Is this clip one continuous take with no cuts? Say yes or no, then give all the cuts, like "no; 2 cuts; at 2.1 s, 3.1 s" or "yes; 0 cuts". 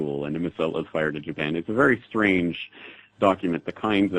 yes; 0 cuts